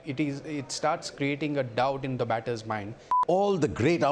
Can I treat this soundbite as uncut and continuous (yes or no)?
no